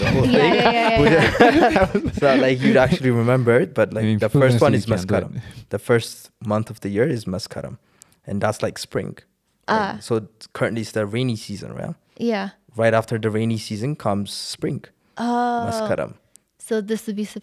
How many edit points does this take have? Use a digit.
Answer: 0